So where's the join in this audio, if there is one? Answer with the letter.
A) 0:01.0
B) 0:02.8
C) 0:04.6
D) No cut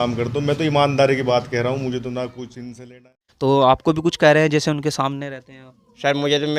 B